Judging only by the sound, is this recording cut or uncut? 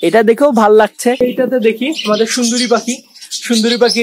cut